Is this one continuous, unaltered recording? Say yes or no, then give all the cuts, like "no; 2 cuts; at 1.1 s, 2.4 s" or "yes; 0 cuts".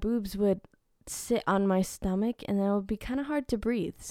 yes; 0 cuts